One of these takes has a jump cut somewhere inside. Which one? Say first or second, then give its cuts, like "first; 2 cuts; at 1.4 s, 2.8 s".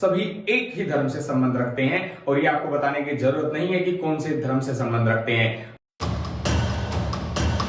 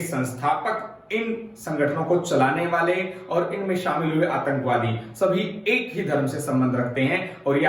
first; 1 cut; at 5.7 s